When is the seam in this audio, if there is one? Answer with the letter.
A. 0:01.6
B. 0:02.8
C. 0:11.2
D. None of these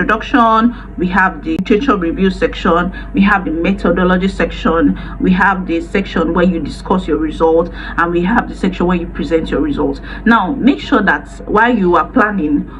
A